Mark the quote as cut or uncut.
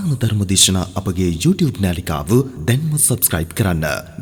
uncut